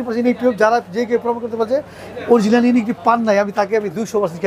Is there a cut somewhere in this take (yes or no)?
no